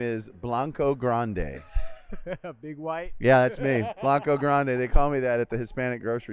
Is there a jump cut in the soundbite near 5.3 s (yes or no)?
no